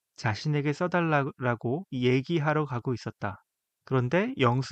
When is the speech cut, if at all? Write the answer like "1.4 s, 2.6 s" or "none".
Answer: none